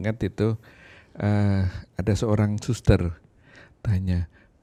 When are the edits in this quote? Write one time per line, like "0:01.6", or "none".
none

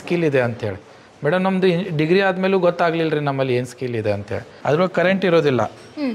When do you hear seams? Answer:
0:04.5

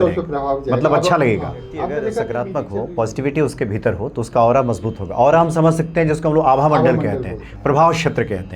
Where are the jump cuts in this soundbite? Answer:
0:02.3

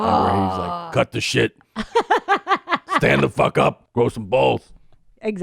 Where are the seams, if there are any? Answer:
0:03.8

